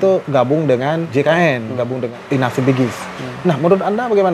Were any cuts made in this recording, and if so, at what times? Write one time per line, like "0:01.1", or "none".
0:01.1
0:02.2